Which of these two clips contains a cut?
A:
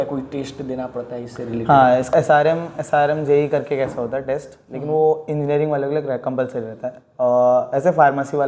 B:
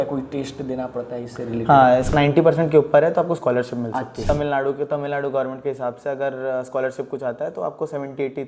B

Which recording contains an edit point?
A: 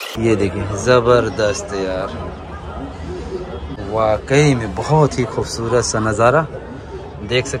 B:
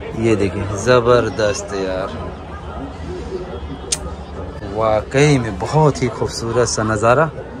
A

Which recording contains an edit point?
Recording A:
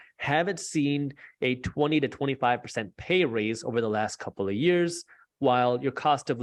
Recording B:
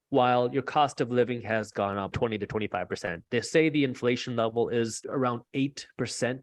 B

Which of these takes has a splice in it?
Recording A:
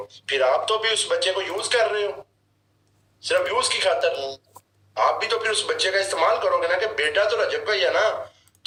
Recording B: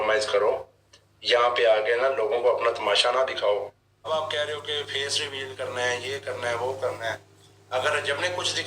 B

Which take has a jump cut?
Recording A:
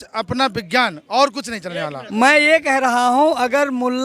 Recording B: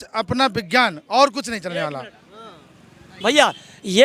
A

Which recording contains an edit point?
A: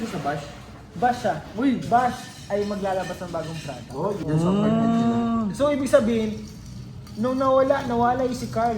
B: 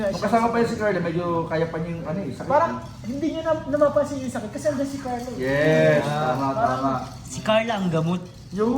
A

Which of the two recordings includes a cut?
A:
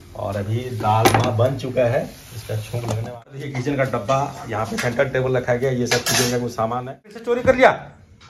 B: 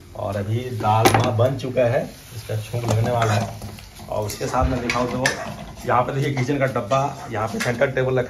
A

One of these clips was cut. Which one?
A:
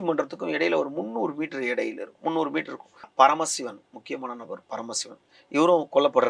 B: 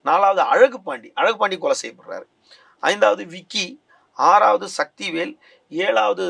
A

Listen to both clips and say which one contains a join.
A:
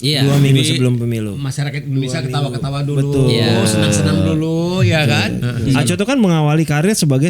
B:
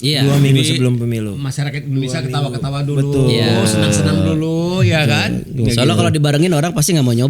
A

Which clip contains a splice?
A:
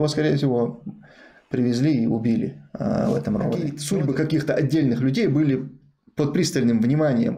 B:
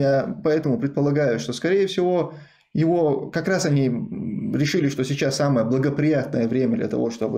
A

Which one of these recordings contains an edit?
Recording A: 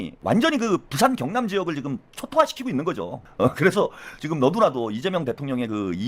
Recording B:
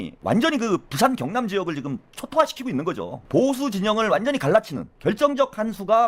B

